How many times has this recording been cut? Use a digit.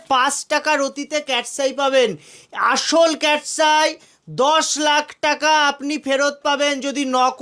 0